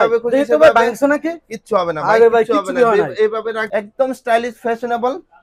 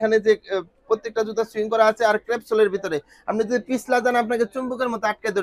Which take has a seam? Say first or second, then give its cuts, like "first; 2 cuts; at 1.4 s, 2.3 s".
first; 1 cut; at 3.6 s